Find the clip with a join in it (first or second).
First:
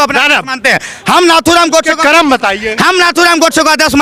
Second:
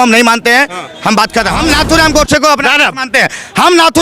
second